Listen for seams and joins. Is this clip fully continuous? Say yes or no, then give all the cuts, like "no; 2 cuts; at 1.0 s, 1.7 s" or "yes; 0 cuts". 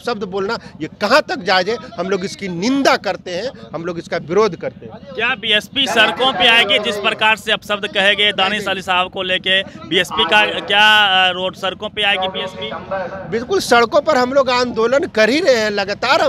yes; 0 cuts